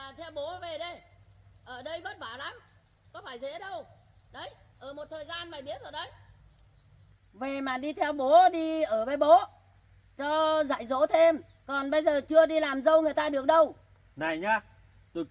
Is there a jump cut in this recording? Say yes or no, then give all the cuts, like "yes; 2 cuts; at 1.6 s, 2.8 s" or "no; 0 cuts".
no; 0 cuts